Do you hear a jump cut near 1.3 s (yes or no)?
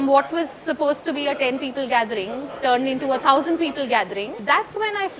no